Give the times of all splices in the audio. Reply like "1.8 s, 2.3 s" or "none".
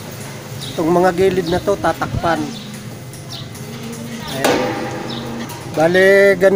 5.5 s

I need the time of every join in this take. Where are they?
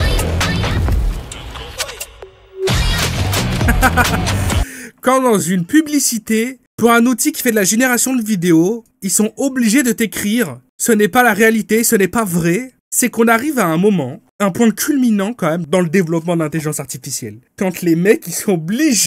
none

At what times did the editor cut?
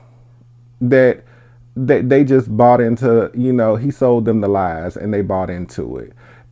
none

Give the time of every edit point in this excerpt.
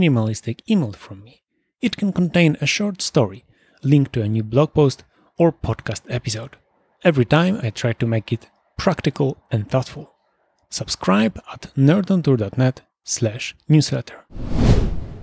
14.3 s

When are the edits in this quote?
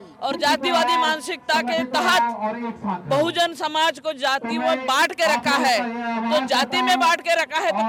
none

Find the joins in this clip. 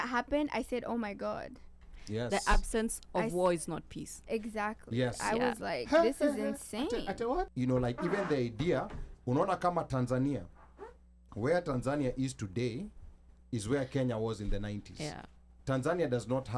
7.5 s

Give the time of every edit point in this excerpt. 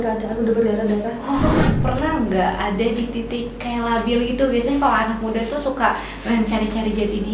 1.7 s

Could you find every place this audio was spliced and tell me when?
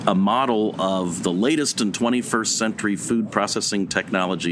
none

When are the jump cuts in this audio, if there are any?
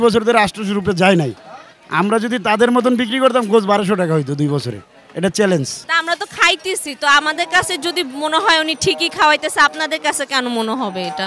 5.7 s

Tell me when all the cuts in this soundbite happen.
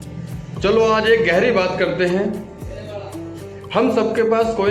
none

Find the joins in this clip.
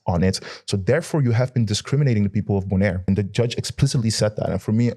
3.1 s

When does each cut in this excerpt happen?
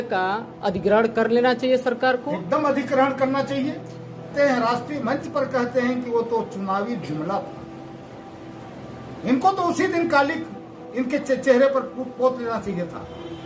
4.3 s

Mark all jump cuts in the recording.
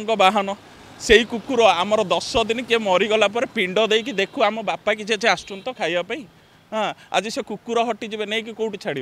none

